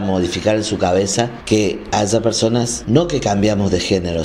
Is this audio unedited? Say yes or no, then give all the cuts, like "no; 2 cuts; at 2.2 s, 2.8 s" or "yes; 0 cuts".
no; 2 cuts; at 1.4 s, 2.8 s